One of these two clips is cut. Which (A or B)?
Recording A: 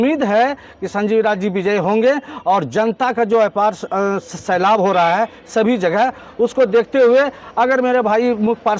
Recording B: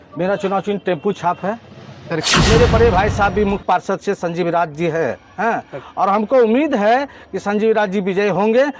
B